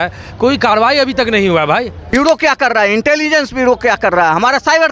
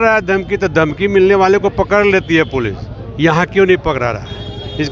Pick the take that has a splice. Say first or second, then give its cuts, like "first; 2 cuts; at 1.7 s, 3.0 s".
first; 1 cut; at 2.0 s